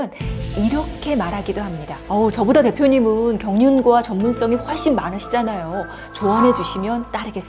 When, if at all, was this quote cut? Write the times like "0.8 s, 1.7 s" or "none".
none